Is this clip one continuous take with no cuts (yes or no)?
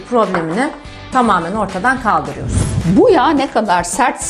no